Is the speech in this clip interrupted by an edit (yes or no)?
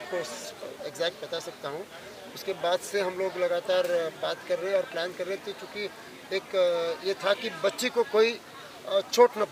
no